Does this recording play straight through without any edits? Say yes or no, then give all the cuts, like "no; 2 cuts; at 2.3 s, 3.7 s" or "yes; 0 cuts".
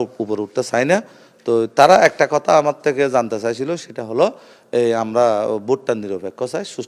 yes; 0 cuts